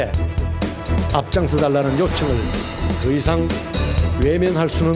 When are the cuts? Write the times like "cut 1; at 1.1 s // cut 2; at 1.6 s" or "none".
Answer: none